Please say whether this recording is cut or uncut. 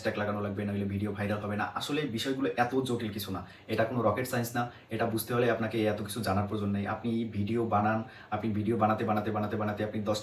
uncut